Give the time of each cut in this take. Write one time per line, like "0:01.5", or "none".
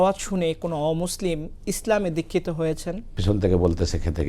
0:03.2